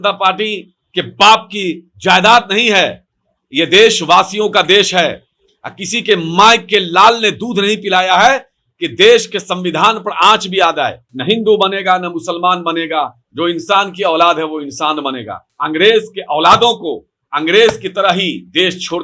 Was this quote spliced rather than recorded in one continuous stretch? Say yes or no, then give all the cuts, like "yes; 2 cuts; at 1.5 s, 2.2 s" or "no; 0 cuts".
yes; 2 cuts; at 11.1 s, 15.5 s